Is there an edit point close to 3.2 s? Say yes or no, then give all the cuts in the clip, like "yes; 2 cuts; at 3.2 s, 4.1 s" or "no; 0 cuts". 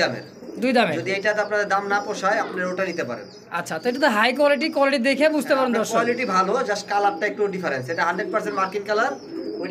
no; 0 cuts